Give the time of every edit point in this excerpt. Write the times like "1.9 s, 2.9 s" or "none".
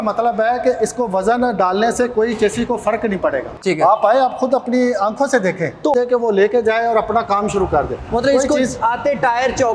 3.4 s, 5.9 s